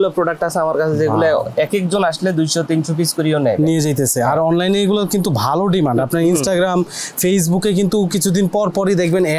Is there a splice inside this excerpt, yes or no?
no